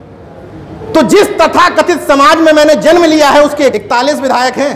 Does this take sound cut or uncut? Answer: cut